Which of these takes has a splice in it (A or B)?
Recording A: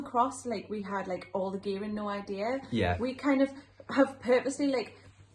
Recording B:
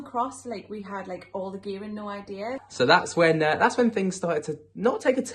B